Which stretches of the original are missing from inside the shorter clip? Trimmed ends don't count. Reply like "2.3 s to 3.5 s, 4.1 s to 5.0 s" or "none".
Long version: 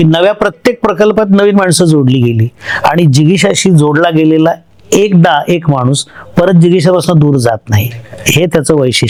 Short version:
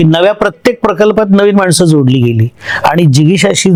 none